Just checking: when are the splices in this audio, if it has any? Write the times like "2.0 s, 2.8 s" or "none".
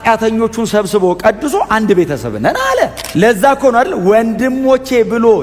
3.0 s